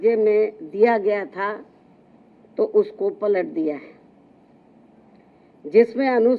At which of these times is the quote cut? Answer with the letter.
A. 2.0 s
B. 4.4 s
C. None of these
C